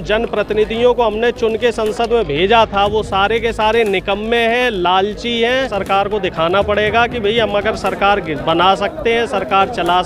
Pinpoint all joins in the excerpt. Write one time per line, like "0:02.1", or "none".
0:05.8